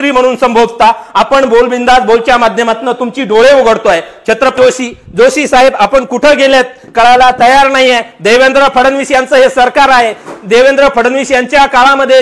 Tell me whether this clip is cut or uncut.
cut